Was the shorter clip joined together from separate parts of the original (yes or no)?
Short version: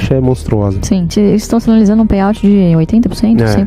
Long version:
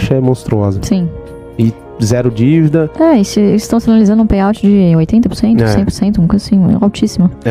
yes